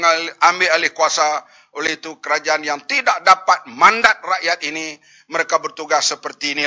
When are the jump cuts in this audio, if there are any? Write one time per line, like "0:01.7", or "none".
none